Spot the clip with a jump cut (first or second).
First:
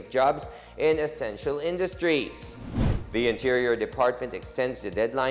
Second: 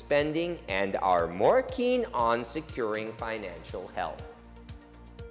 second